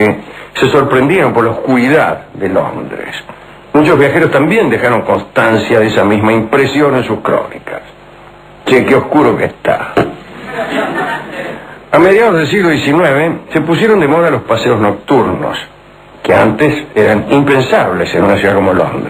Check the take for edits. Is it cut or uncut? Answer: cut